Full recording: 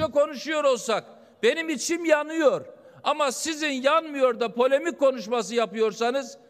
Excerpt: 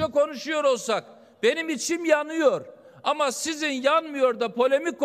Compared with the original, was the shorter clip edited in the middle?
no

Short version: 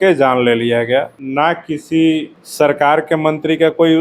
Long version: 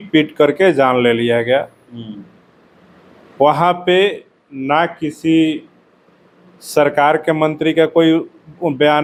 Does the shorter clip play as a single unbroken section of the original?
no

